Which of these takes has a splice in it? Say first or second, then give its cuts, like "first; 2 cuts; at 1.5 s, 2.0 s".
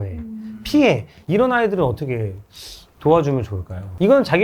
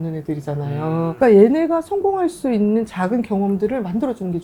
first; 1 cut; at 1.1 s